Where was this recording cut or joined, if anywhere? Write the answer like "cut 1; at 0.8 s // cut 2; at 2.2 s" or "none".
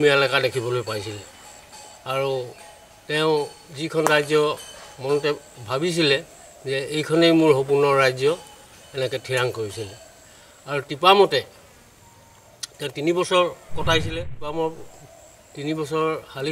cut 1; at 14.1 s